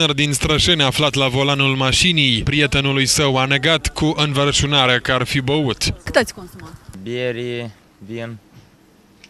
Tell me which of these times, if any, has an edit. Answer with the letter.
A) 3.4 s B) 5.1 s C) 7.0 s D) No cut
B